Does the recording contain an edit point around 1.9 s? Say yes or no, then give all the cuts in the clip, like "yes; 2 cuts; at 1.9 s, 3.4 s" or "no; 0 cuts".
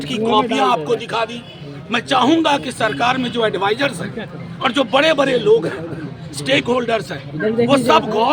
no; 0 cuts